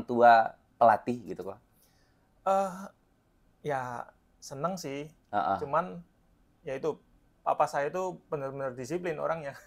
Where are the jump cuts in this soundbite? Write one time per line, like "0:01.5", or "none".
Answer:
none